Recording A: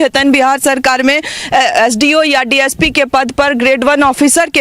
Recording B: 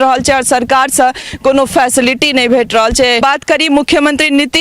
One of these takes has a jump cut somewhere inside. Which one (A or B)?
B